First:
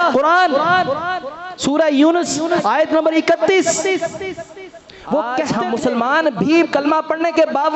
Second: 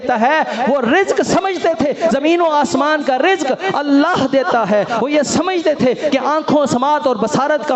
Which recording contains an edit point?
first; 1 cut; at 5.5 s

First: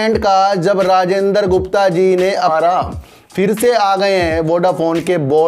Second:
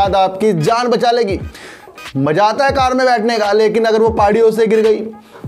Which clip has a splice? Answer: first; 1 cut; at 2.5 s

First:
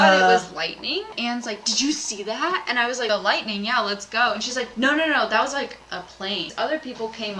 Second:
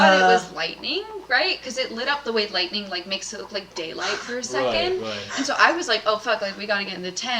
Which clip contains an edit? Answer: first; 3 cuts; at 1.1 s, 3.1 s, 6.5 s

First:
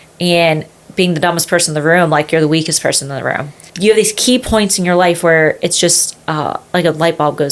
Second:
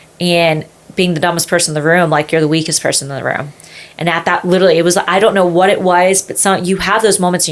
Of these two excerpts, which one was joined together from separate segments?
first; 1 cut; at 3.6 s

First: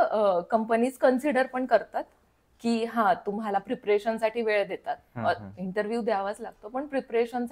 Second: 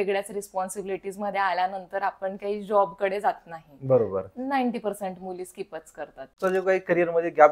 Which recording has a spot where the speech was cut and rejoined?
second; 1 cut; at 6.4 s

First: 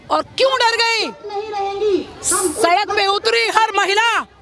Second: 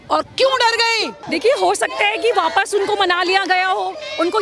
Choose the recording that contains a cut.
second; 1 cut; at 1.1 s

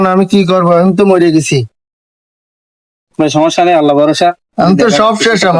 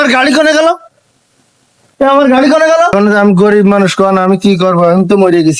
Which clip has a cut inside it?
second; 1 cut; at 2.9 s

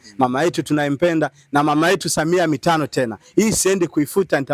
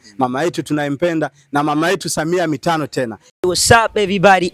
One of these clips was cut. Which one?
second; 1 cut; at 3.2 s

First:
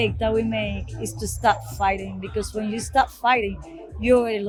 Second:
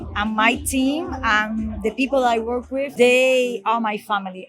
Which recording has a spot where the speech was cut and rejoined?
second; 1 cut; at 2.9 s

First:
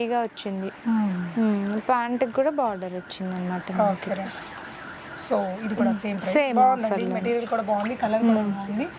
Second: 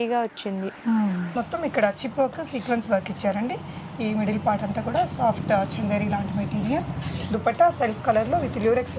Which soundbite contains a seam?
second; 1 cut; at 1.3 s

